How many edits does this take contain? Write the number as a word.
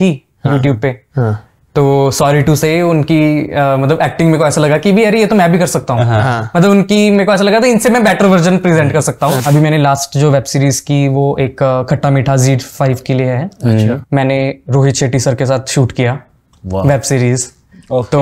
two